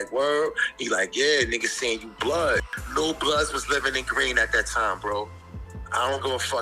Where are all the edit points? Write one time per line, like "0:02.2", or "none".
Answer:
0:02.7